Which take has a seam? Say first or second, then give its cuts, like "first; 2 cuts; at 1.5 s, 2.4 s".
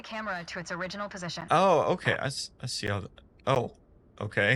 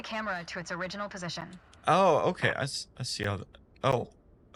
first; 1 cut; at 1.4 s